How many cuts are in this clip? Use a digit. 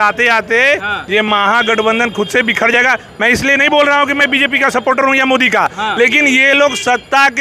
0